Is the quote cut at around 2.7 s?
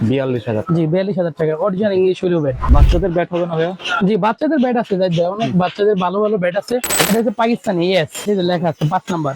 yes; 3 cuts; at 2.7 s, 7.0 s, 8.2 s

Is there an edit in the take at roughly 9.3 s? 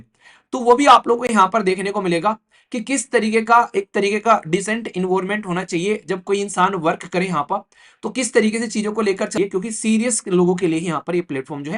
yes; 1 cut; at 9.3 s

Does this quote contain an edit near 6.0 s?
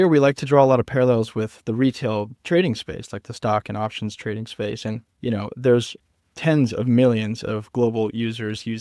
no; 0 cuts

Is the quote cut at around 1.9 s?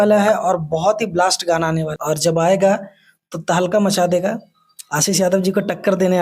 yes; 1 cut; at 1.9 s

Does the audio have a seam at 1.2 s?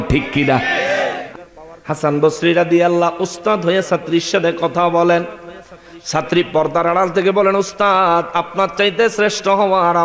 yes; 1 cut; at 1.2 s

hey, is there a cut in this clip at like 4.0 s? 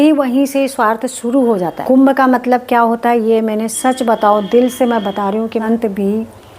no; 2 cuts; at 1.8 s, 5.6 s

